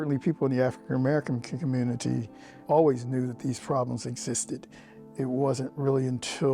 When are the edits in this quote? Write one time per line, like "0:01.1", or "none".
0:02.6
0:05.0